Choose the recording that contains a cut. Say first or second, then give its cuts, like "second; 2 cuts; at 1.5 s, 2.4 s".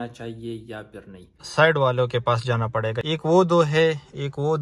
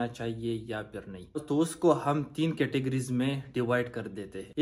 first; 2 cuts; at 1.3 s, 3.0 s